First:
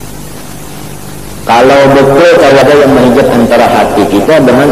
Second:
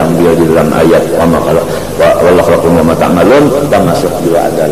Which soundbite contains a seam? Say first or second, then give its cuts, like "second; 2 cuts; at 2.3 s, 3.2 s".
first; 1 cut; at 2.6 s